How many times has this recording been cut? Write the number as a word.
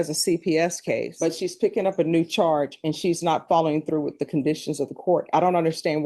zero